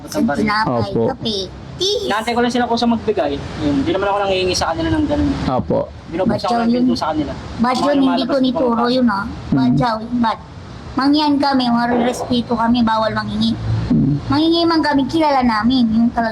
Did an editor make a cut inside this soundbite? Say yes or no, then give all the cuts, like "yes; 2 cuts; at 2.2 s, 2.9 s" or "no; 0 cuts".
no; 0 cuts